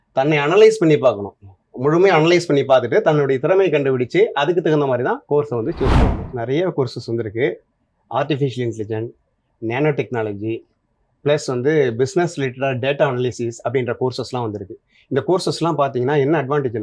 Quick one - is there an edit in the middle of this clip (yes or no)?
yes